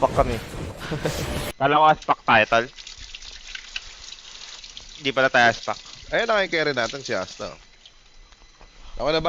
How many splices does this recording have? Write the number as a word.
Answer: one